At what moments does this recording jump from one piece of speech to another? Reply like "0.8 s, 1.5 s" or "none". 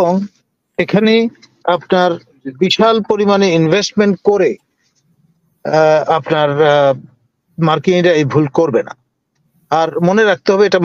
none